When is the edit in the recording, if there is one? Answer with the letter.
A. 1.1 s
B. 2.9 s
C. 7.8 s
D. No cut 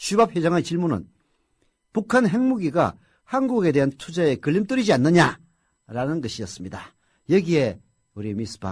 C